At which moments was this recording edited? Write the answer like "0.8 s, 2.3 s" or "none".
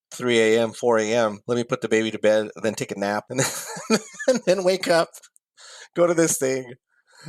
1.4 s, 3.2 s

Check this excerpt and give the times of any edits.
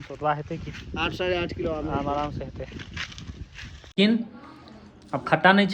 3.9 s

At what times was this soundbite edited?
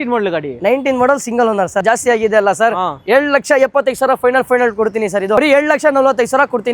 1.8 s, 5.4 s

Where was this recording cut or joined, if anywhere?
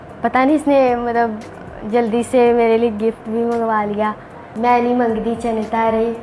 4.5 s

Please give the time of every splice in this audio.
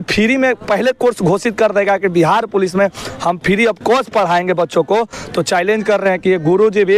none

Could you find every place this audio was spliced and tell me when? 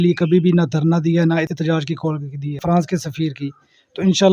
1.5 s, 2.6 s

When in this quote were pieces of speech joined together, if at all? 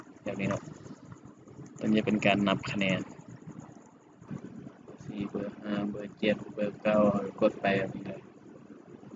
4.2 s

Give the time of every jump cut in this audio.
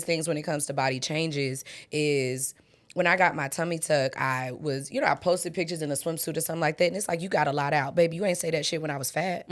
none

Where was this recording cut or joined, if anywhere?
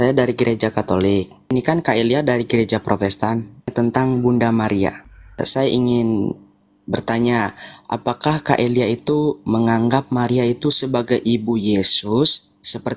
1.5 s, 3.7 s, 5.2 s

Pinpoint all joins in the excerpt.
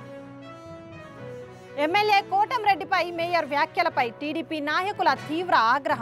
1.1 s

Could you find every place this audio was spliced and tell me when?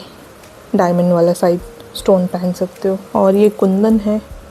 3.0 s

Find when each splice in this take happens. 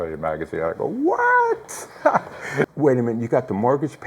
2.7 s

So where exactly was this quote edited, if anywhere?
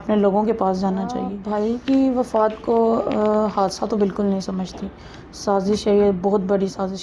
1.4 s

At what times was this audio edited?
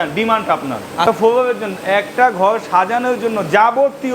1.1 s

